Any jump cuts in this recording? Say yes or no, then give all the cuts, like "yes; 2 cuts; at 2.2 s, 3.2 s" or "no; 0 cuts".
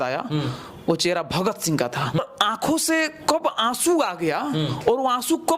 yes; 1 cut; at 2.2 s